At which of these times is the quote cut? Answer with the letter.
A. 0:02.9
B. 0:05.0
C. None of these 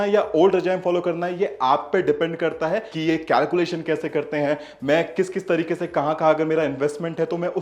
A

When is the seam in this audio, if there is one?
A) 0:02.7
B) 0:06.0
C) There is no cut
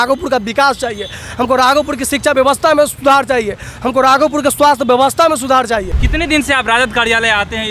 B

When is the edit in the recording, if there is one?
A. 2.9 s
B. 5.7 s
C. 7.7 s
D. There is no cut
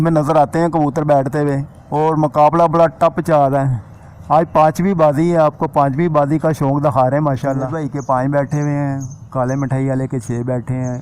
C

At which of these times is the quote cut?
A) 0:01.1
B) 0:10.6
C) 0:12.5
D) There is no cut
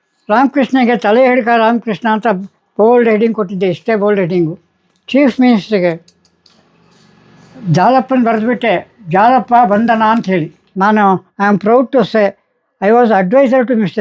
B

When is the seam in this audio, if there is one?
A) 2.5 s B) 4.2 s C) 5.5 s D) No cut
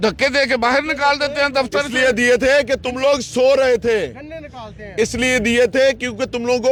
D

